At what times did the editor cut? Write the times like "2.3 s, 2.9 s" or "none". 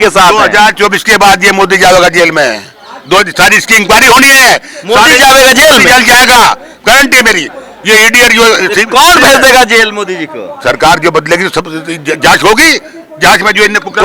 none